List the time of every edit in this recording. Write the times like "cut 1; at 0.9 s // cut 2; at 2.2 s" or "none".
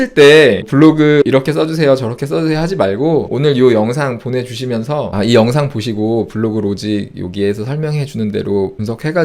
none